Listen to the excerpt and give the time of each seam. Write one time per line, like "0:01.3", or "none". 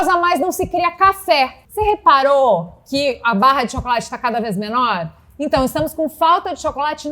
0:01.6